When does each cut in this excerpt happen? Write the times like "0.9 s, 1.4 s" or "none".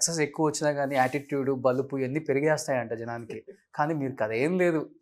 none